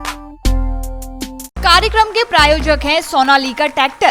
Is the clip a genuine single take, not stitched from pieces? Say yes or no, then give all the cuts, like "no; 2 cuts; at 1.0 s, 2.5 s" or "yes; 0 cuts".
no; 1 cut; at 1.5 s